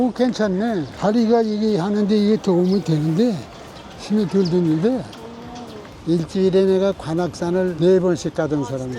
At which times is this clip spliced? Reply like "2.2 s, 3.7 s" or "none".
0.9 s, 5.9 s